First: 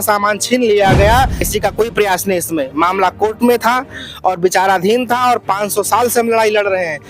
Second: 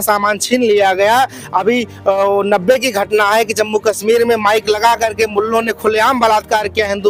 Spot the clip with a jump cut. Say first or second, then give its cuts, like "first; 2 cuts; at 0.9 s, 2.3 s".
first; 1 cut; at 1.4 s